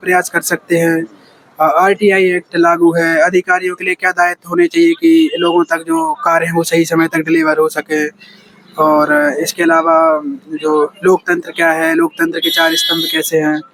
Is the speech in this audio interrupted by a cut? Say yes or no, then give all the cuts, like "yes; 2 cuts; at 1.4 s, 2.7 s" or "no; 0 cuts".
no; 0 cuts